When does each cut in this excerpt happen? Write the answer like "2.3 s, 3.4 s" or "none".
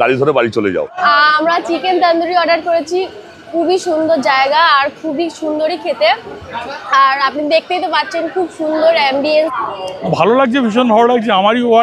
0.9 s, 9.5 s